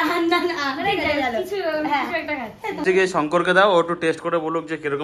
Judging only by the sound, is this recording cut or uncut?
cut